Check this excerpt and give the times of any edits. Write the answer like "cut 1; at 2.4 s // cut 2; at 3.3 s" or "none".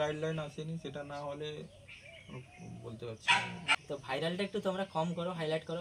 cut 1; at 3.8 s